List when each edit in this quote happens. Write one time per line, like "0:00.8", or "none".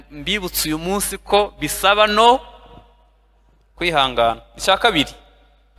none